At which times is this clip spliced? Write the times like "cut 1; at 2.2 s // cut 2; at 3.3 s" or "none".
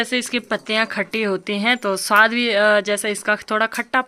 none